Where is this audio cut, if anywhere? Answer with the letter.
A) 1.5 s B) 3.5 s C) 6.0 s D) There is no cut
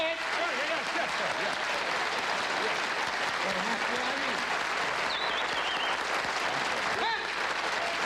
C